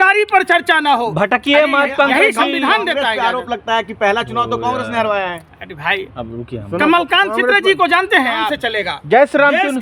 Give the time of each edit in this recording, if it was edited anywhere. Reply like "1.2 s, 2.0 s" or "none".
8.6 s